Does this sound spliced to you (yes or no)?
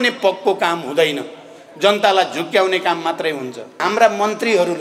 yes